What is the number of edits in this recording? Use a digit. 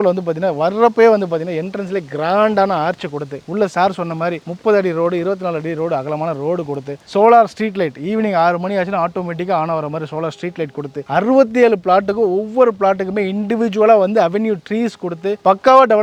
0